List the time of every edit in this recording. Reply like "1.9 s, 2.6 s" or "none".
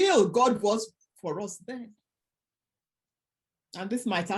none